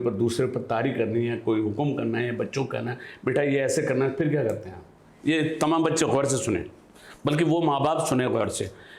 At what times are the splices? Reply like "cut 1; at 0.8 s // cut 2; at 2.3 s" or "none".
none

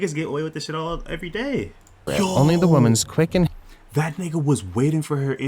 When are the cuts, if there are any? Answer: cut 1; at 2.0 s

